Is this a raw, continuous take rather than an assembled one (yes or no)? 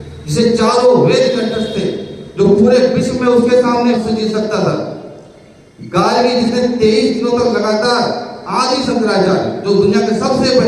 no